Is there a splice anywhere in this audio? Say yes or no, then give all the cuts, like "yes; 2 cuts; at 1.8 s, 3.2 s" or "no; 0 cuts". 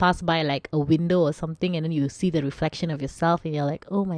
no; 0 cuts